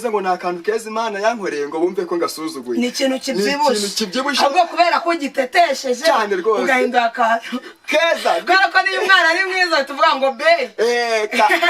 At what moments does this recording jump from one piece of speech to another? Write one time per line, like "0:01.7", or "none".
none